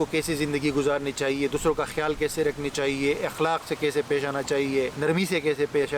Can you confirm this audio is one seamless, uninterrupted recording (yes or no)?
no